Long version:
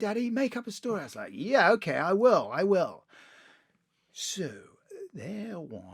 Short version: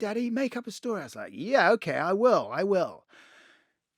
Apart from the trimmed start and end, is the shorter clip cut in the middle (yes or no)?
no